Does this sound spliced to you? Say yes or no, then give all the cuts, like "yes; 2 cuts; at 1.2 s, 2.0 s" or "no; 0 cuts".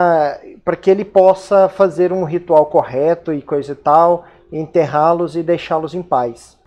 yes; 1 cut; at 3.6 s